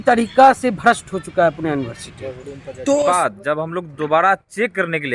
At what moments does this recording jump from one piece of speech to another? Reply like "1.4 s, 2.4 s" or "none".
3.1 s